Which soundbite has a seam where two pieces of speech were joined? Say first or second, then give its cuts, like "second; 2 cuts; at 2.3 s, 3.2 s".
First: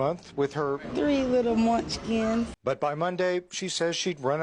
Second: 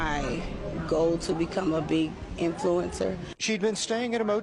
first; 1 cut; at 2.5 s